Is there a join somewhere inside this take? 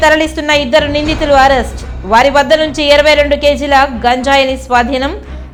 no; 0 cuts

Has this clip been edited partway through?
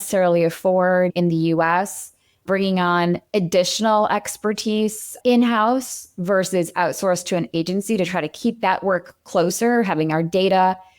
yes; 1 cut; at 1.1 s

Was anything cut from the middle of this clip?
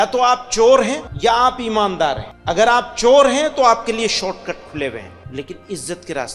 yes; 3 cuts; at 1.1 s, 2.3 s, 5.2 s

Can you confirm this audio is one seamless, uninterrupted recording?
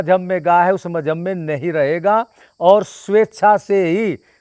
yes; 0 cuts

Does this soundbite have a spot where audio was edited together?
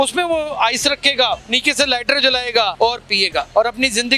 yes; 2 cuts; at 1.5 s, 3.0 s

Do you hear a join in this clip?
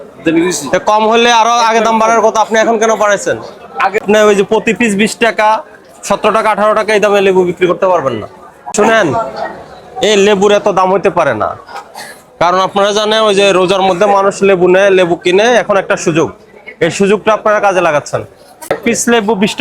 yes; 3 cuts; at 4.0 s, 8.7 s, 18.7 s

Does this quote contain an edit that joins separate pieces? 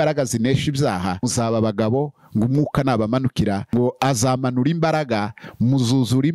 yes; 2 cuts; at 1.2 s, 3.7 s

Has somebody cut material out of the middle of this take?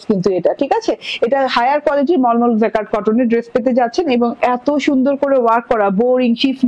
no; 0 cuts

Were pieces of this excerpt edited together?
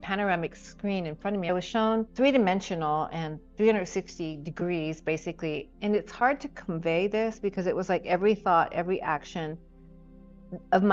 yes; 2 cuts; at 1.5 s, 5.6 s

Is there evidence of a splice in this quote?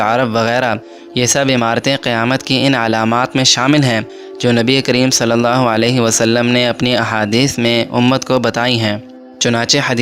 no; 0 cuts

